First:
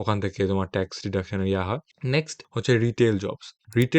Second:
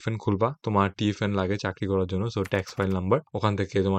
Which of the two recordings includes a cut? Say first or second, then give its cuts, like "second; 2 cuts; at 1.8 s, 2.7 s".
first; 1 cut; at 1.9 s